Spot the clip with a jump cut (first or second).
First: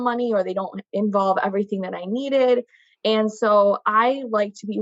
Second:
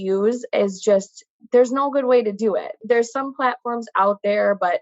second